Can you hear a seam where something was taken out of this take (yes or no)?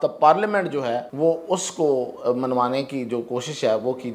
yes